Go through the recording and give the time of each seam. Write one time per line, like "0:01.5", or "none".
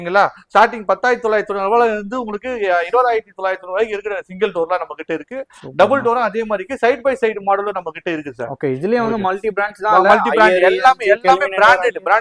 none